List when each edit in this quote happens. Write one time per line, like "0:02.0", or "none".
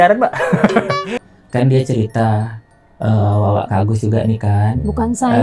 0:01.2